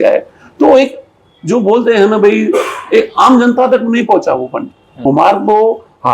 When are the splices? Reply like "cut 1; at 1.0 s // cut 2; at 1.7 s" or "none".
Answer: cut 1; at 4.9 s